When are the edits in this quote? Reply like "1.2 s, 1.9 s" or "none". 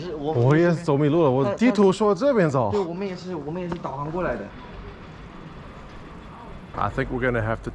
4.5 s, 6.6 s